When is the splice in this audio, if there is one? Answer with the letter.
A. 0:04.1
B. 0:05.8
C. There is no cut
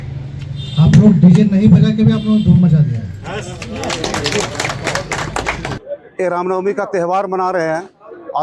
B